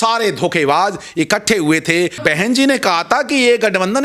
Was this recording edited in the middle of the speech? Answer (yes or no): yes